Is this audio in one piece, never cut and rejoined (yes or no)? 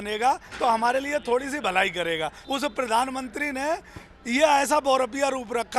no